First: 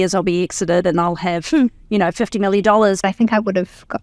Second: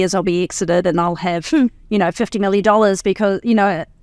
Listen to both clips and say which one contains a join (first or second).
first